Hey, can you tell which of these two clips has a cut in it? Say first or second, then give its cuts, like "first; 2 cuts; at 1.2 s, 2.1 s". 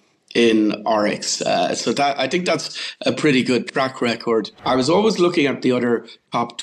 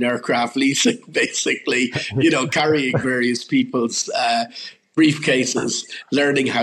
first; 1 cut; at 4.5 s